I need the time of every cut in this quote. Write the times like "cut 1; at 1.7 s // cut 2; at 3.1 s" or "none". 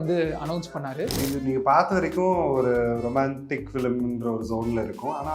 cut 1; at 1.2 s